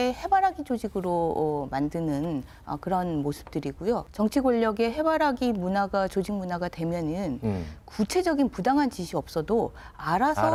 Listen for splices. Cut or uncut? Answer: uncut